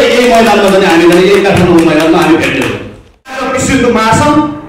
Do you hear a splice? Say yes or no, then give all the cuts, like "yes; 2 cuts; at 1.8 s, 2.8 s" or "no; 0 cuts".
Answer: yes; 1 cut; at 3.4 s